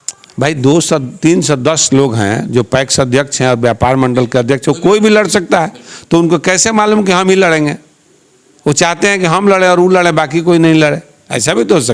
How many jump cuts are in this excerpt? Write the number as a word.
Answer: zero